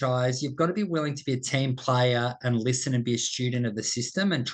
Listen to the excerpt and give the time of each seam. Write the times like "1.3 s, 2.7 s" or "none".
none